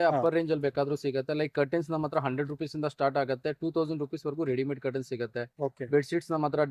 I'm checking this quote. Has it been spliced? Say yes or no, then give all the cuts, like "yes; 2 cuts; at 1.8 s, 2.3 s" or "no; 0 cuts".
no; 0 cuts